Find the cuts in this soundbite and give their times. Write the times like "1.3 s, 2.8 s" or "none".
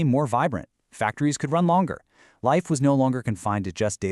none